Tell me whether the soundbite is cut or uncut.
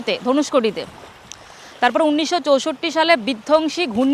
uncut